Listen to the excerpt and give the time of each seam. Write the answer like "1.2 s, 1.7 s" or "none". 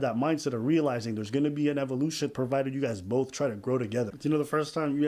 4.1 s